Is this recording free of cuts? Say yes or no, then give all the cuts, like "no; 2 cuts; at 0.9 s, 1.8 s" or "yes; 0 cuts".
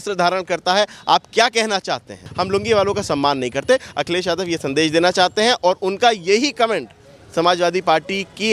no; 1 cut; at 2.3 s